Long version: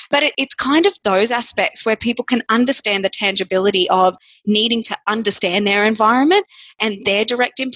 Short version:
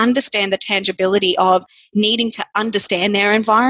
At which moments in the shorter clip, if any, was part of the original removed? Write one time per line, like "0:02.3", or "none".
none

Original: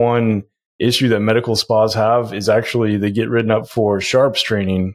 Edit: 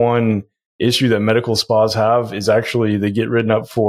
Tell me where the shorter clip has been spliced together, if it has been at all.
none

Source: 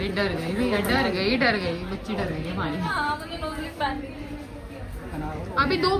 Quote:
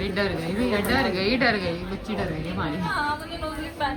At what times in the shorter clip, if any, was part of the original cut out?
none

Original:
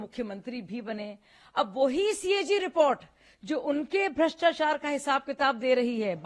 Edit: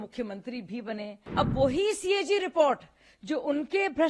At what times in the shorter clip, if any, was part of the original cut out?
0:01.2

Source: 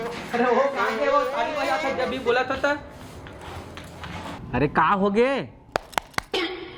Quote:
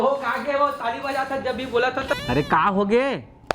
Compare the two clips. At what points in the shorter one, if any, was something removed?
0:02.1

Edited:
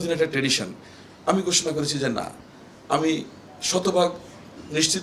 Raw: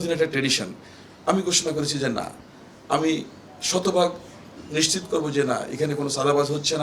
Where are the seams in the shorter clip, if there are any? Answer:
none

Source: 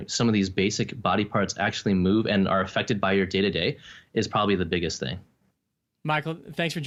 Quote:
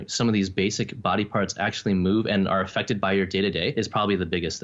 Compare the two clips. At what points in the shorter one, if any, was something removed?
0:03.7

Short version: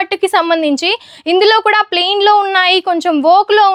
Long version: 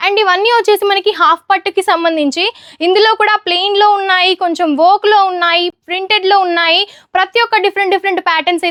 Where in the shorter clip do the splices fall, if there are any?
none

